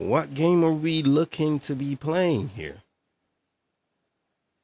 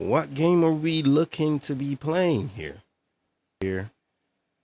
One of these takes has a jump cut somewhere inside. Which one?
second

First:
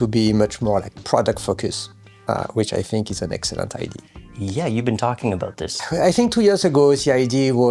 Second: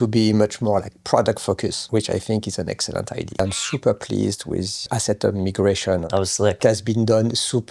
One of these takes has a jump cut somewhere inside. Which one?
second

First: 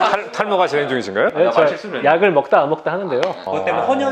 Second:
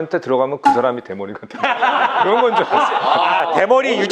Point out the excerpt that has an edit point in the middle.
first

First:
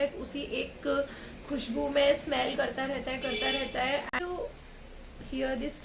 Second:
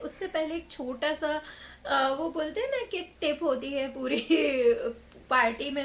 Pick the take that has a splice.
first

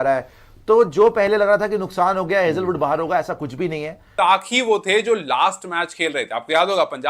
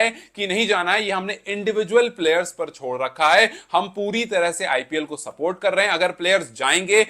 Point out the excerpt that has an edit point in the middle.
first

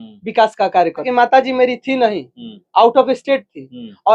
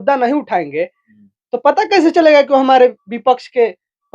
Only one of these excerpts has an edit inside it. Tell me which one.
first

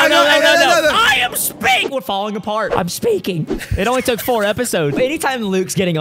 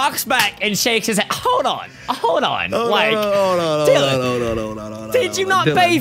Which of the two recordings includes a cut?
first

